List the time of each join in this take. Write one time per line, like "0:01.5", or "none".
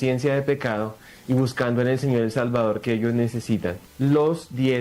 0:03.8

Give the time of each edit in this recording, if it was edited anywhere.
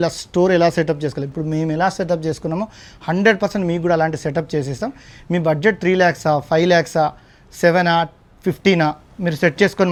none

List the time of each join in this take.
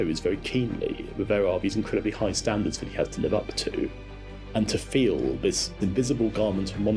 0:04.1
0:05.7

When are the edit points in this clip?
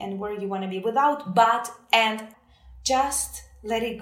0:02.2

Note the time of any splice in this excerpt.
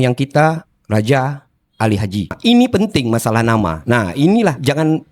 0:02.3

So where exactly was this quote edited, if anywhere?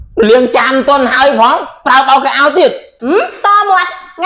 0:02.9

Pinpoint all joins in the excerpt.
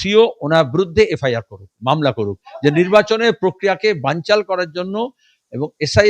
none

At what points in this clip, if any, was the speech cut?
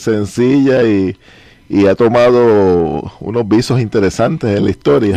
none

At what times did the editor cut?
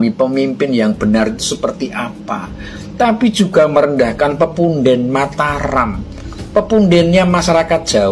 none

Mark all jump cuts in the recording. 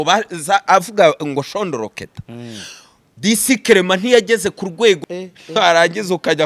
0:05.0

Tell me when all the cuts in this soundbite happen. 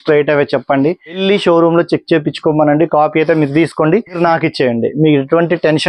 0:01.2
0:04.2

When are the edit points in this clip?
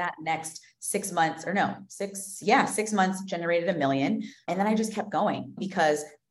0:04.5
0:05.6

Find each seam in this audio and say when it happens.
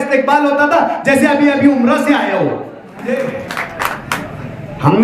0:03.1

